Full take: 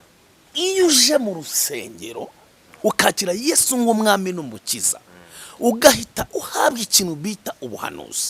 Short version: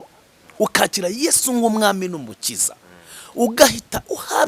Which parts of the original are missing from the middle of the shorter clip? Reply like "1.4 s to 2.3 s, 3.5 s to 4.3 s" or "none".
none